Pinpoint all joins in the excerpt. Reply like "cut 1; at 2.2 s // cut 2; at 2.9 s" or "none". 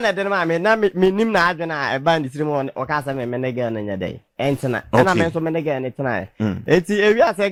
none